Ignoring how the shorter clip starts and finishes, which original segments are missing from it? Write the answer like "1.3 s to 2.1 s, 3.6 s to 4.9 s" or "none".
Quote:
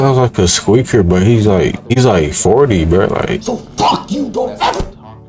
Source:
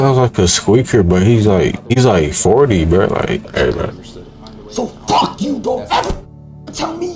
3.4 s to 4.7 s